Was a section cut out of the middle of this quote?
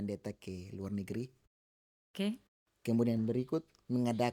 no; 0 cuts

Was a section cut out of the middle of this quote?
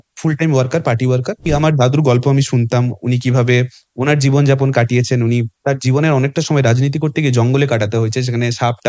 yes; 2 cuts; at 1.5 s, 5.5 s

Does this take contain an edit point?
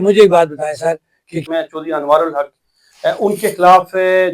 yes; 1 cut; at 1.5 s

